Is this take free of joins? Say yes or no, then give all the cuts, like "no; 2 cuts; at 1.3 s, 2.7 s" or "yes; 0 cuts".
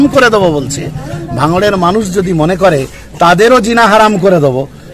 yes; 0 cuts